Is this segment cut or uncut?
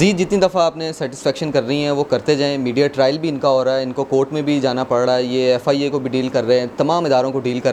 uncut